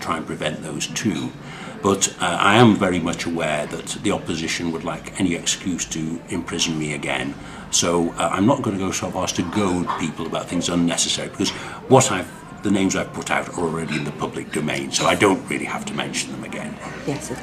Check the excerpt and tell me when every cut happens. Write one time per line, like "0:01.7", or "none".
0:02.1

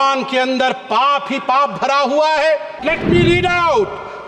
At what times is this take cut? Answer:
0:02.8

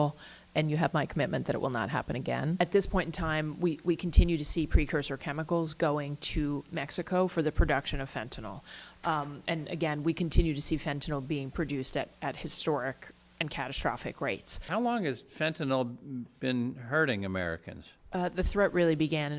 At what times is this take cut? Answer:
0:02.6
0:14.5

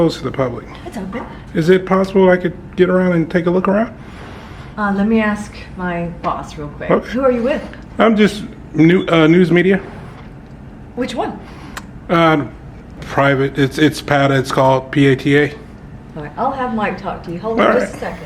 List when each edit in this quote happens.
none

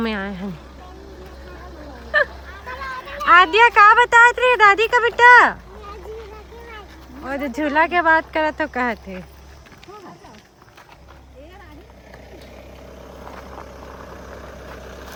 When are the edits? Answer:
none

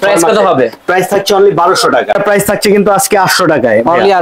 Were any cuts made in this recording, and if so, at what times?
0:02.1

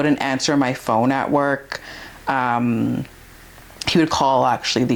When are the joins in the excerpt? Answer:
none

